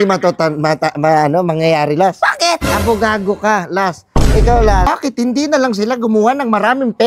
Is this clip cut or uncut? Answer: cut